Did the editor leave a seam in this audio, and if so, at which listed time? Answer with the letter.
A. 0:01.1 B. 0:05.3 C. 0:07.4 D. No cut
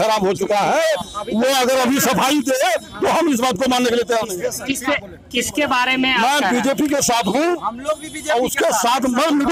D